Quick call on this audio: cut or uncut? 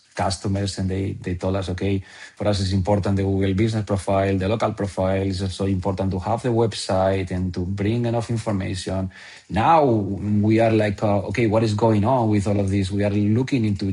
cut